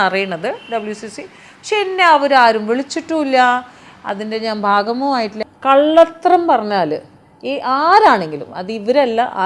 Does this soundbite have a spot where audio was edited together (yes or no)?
yes